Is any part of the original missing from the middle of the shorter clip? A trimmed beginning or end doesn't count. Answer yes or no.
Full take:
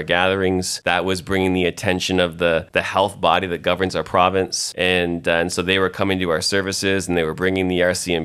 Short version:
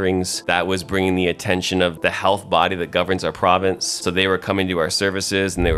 yes